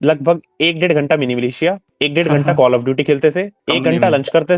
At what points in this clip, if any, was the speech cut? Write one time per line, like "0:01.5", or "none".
none